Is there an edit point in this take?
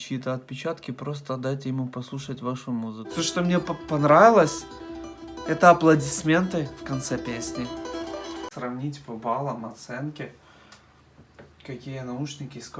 yes; 2 cuts; at 3.0 s, 8.5 s

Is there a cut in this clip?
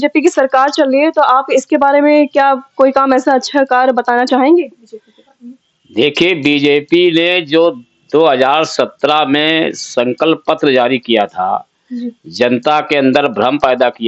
no; 0 cuts

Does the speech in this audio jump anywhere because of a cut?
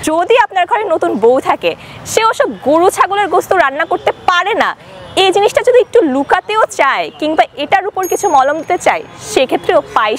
no; 0 cuts

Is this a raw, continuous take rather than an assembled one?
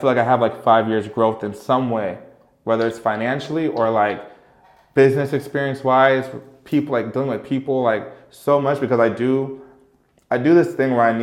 yes; 0 cuts

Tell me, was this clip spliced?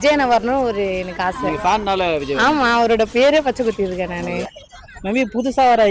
yes; 1 cut; at 4.6 s

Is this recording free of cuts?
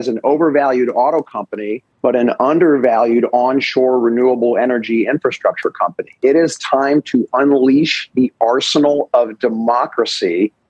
yes; 0 cuts

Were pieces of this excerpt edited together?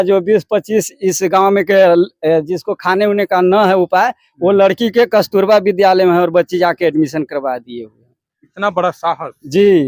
no; 0 cuts

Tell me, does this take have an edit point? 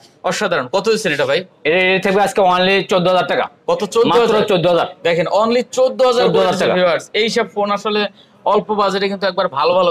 no; 0 cuts

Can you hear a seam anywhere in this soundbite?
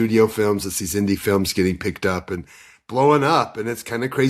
no; 0 cuts

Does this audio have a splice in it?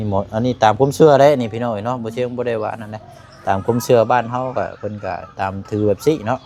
no; 0 cuts

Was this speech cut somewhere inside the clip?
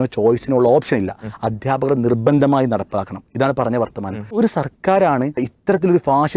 yes; 2 cuts; at 4.3 s, 5.5 s

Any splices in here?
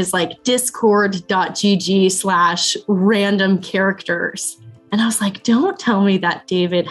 no; 0 cuts

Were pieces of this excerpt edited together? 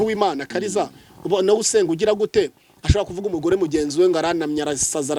no; 0 cuts

